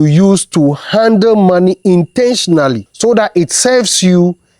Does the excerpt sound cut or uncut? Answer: cut